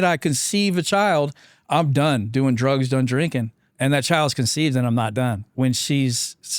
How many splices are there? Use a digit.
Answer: 2